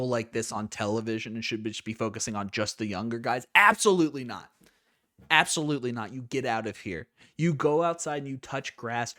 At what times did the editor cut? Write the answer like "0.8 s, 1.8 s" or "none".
none